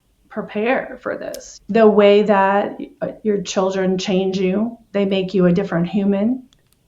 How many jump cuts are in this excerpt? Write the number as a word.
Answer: one